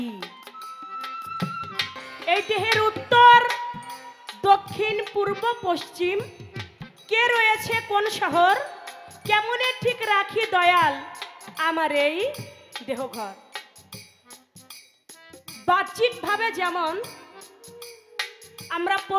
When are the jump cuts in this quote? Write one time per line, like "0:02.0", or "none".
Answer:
0:02.0

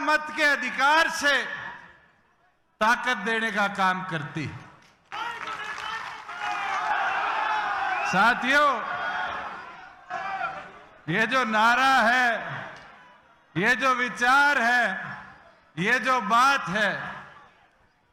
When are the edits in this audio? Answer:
none

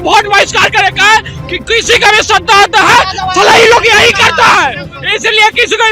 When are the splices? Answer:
none

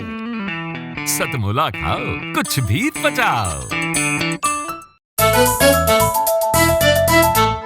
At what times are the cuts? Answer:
0:05.0

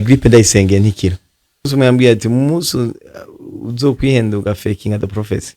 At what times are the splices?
0:01.7

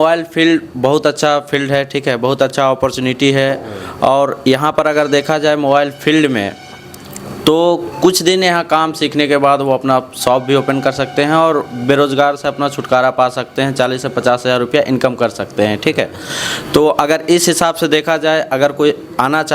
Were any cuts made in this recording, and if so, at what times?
none

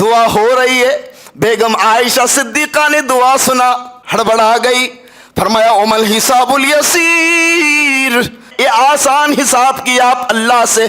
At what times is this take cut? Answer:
0:03.9
0:08.5

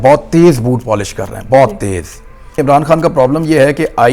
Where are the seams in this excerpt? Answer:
0:02.6

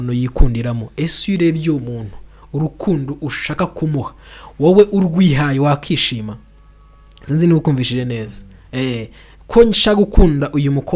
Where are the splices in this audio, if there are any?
none

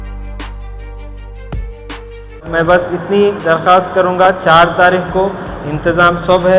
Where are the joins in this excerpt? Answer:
0:00.8
0:02.5

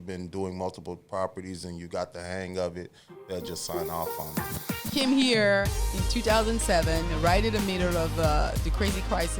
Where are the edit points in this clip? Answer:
0:04.2

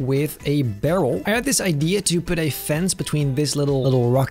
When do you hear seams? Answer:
0:01.2

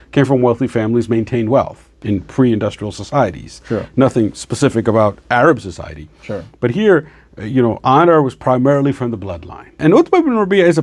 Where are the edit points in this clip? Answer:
0:09.8

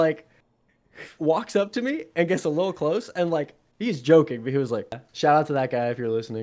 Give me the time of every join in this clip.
0:05.0

